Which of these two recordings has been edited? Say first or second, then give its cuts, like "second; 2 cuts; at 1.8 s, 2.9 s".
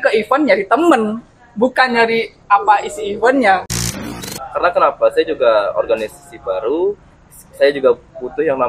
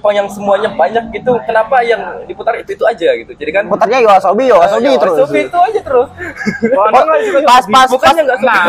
first; 1 cut; at 4.3 s